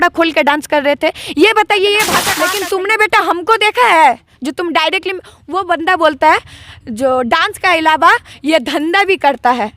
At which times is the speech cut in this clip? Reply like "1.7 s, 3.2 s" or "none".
2.2 s